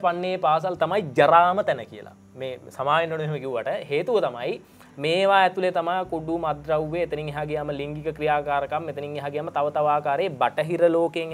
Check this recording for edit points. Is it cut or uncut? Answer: uncut